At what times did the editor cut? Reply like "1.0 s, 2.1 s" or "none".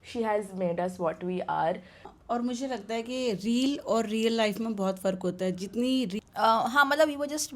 2.0 s, 6.2 s